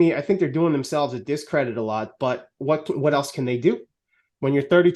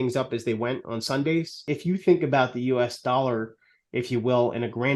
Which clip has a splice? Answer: second; 1 cut; at 1.7 s

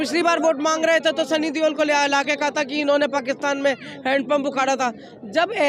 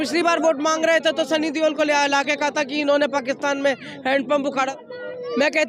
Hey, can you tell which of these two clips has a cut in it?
second; 1 cut; at 4.7 s

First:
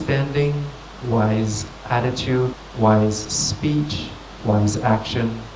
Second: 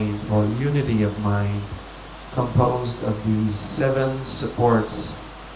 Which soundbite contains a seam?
first; 1 cut; at 2.5 s

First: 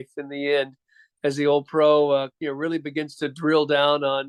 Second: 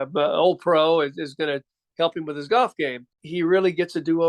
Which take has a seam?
second; 1 cut; at 3.2 s

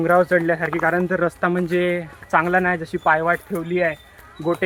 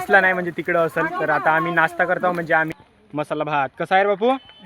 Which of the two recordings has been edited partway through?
second; 1 cut; at 2.7 s

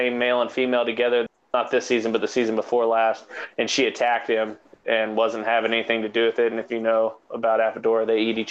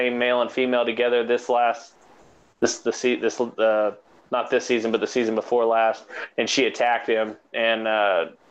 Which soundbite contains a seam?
first; 2 cuts; at 1.3 s, 4.6 s

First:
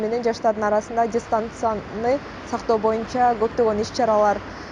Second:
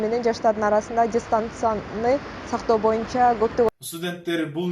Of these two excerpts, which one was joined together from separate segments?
second; 1 cut; at 3.7 s

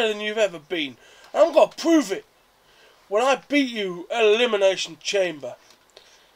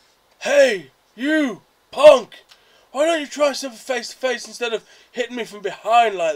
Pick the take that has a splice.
second; 1 cut; at 3.4 s

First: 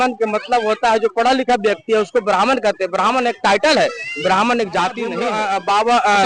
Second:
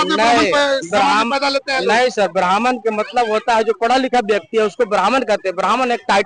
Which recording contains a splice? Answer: first; 1 cut; at 5.2 s

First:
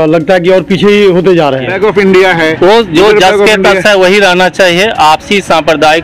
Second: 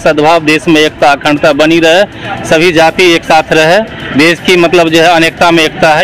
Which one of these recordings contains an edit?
first; 1 cut; at 1.7 s

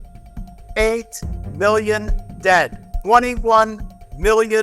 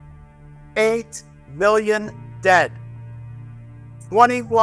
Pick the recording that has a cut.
first; 1 cut; at 2.9 s

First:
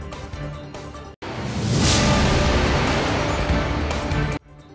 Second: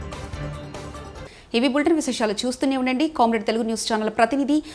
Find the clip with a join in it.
first; 1 cut; at 1.1 s

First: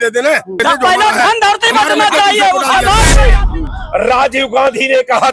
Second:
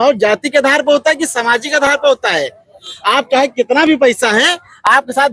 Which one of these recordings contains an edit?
first; 1 cut; at 3.2 s

